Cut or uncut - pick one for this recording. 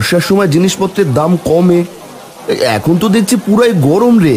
uncut